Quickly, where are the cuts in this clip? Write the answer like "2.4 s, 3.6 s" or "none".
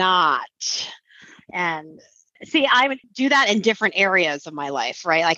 3.0 s